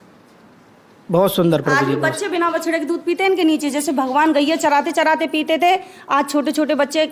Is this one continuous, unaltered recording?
yes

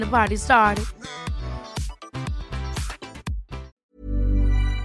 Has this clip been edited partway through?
yes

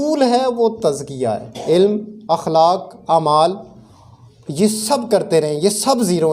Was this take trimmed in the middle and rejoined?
yes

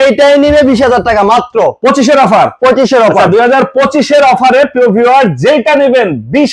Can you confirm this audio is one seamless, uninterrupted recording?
yes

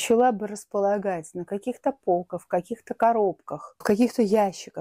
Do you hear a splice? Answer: no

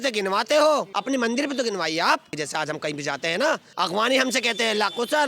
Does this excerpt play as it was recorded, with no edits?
no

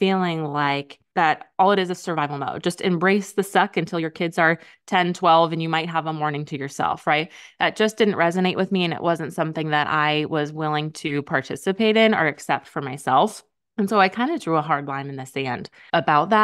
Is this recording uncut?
no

